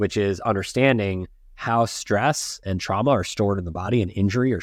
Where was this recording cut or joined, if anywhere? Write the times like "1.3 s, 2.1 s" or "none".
none

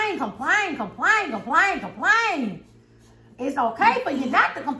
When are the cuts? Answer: none

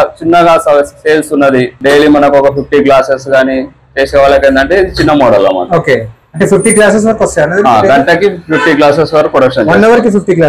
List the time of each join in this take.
1.8 s

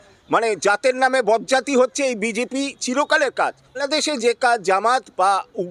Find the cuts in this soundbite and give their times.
3.8 s

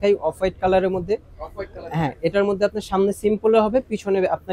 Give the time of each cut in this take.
none

